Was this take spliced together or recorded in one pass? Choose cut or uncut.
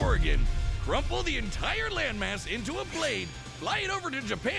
uncut